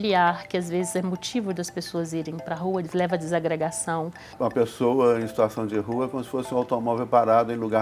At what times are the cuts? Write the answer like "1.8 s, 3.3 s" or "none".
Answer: 4.3 s